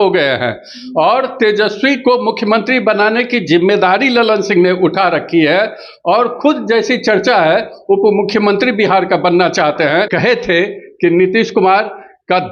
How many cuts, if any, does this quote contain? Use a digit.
1